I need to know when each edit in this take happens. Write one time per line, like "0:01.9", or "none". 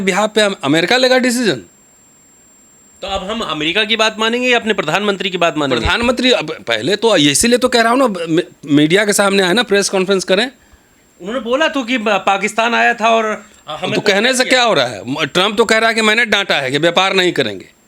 none